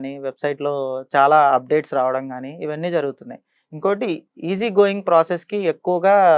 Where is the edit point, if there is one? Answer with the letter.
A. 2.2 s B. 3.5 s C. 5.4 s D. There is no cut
D